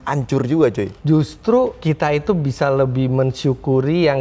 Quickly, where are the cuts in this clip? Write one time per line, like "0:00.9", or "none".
0:00.9